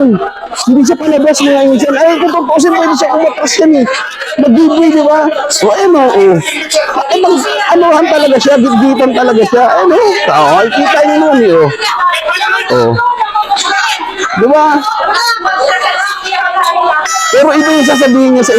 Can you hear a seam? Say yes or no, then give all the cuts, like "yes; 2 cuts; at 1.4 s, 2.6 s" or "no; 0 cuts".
no; 0 cuts